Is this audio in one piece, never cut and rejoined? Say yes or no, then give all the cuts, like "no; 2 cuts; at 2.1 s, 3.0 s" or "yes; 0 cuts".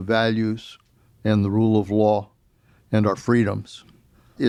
yes; 0 cuts